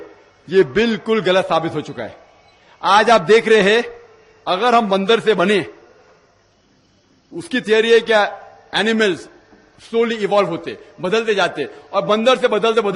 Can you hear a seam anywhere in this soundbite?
no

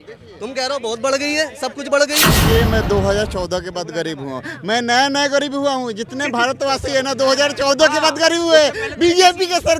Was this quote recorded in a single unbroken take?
no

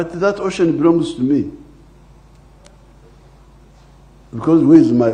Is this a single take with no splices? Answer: yes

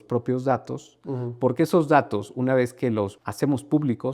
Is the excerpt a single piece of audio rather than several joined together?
no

